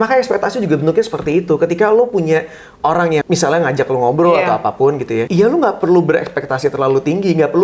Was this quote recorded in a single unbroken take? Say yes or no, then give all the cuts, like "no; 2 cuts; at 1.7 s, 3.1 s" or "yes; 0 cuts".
no; 2 cuts; at 3.2 s, 5.3 s